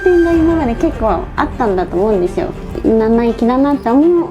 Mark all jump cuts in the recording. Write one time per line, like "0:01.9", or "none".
0:02.8